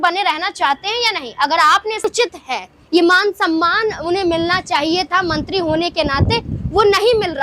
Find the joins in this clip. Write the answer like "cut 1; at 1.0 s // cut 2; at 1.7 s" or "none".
cut 1; at 2.0 s